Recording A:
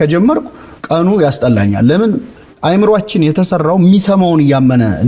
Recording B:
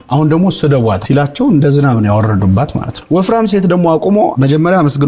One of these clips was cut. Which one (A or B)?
B